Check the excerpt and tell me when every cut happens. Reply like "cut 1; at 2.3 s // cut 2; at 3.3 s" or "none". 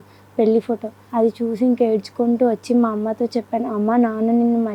cut 1; at 1.0 s